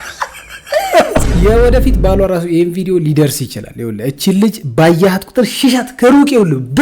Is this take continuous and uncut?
no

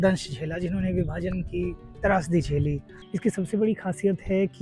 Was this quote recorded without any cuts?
no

